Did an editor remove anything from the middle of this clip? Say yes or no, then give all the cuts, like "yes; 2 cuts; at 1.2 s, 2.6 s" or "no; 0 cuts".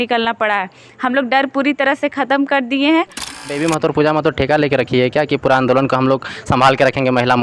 yes; 1 cut; at 3.4 s